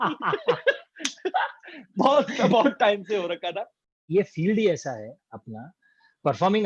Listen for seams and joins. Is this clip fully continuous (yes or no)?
no